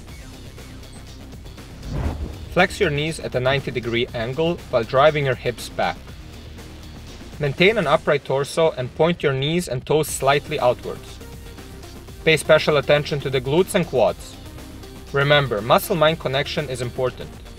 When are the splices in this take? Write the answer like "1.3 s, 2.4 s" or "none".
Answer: 1.8 s, 5.9 s, 7.4 s